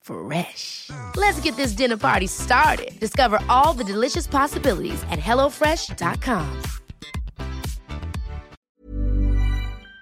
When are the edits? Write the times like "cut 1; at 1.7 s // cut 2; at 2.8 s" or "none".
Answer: cut 1; at 8.6 s